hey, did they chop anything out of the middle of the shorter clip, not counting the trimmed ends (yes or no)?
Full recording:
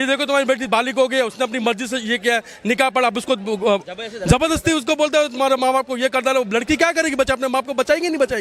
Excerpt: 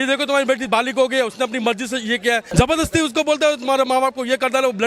yes